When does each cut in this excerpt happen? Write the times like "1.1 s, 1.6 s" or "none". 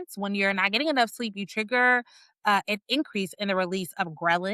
none